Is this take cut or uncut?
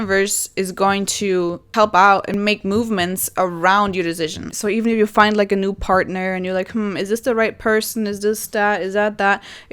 cut